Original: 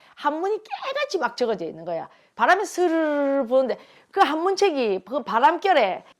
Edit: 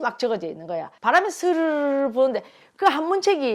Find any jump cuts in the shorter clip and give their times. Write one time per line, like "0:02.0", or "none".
0:00.9